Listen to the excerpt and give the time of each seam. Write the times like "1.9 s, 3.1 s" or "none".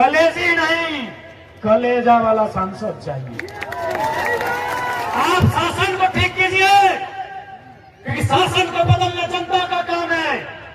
5.1 s